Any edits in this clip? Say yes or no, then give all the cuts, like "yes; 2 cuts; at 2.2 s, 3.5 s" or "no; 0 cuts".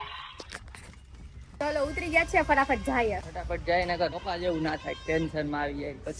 yes; 3 cuts; at 1.6 s, 3.3 s, 4.2 s